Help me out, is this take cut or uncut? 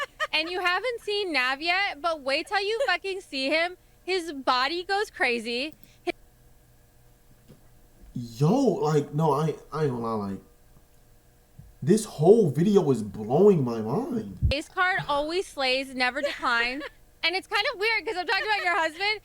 cut